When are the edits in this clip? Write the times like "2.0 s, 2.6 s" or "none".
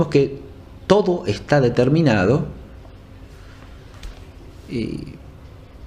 4.7 s